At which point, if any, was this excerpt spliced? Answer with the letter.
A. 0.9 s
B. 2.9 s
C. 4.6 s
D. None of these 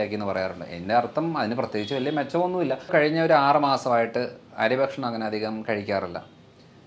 B